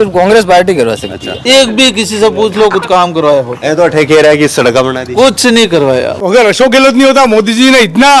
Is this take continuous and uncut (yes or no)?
no